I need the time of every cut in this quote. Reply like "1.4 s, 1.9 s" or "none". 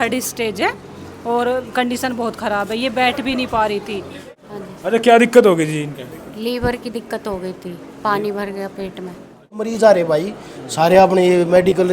4.3 s, 9.7 s